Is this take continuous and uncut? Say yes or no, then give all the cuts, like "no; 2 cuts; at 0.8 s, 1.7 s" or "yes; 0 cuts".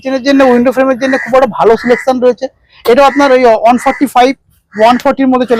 yes; 0 cuts